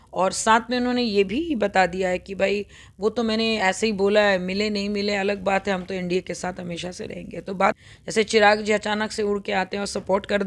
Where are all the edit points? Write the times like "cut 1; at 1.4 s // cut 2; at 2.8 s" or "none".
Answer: cut 1; at 7.8 s